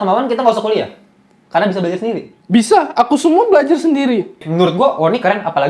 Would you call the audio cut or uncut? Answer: cut